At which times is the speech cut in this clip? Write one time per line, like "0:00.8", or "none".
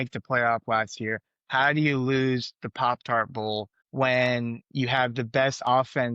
none